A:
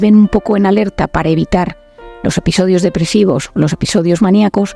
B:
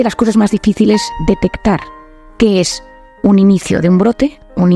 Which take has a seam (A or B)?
B